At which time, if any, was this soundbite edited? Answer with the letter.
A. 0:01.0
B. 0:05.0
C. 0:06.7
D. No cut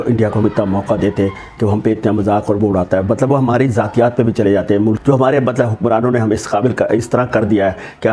B